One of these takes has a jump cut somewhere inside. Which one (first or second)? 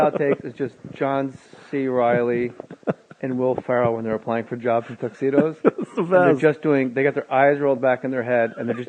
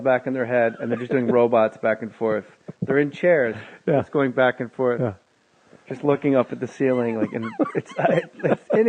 second